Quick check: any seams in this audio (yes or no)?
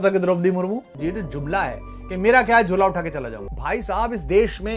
yes